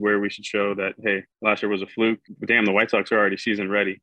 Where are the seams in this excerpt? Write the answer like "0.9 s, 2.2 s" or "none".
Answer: 1.3 s, 2.3 s